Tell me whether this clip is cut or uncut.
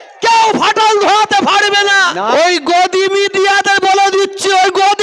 cut